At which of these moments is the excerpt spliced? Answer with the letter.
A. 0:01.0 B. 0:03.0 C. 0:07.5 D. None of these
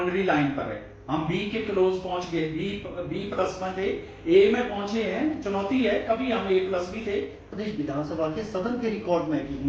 C